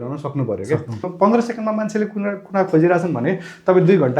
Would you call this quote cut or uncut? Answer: cut